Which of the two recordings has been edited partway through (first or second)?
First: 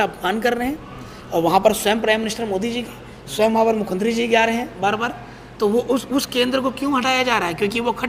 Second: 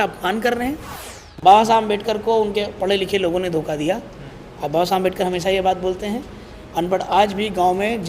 second